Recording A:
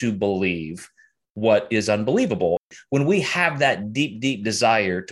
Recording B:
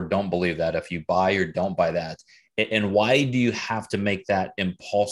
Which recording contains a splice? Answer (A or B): A